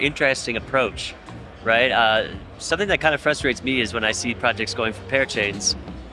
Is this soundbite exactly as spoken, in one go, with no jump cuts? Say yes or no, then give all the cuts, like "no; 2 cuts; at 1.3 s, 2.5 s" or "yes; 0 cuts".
yes; 0 cuts